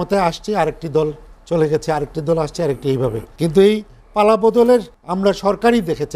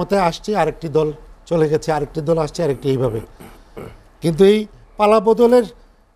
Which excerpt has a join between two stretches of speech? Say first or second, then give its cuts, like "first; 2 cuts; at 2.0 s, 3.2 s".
first; 2 cuts; at 3.3 s, 5.0 s